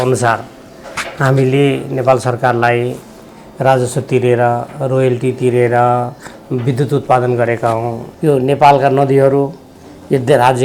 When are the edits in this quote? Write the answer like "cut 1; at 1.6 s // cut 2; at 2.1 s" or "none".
cut 1; at 8.0 s